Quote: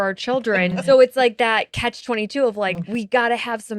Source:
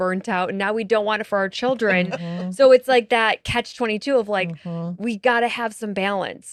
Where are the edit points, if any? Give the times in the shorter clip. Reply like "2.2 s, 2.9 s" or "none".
0.8 s, 2.8 s